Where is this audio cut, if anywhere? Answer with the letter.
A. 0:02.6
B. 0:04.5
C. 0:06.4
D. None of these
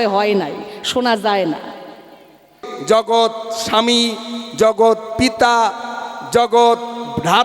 A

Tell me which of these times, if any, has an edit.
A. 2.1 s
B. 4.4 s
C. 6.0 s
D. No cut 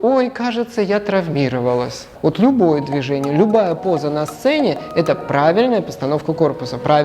A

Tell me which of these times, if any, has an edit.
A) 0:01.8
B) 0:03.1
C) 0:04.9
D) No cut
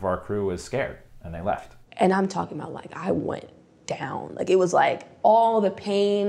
A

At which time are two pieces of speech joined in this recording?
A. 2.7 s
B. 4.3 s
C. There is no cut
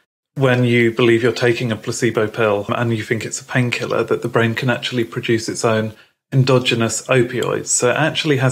A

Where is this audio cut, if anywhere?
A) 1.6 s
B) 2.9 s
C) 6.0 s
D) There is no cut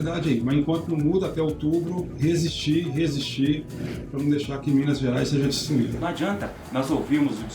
C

